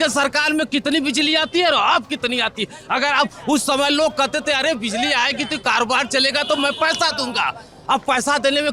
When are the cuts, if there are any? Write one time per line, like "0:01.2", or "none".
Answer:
none